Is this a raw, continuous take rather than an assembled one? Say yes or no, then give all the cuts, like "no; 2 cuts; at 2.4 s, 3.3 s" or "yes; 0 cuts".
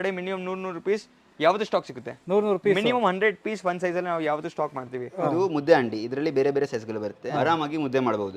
no; 2 cuts; at 5.2 s, 7.2 s